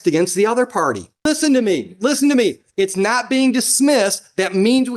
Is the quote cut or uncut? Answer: cut